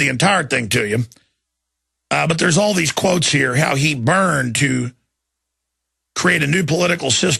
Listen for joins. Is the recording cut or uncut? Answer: uncut